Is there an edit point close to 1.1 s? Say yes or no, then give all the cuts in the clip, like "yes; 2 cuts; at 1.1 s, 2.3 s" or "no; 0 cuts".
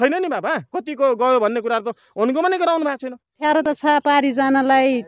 no; 1 cut; at 3.6 s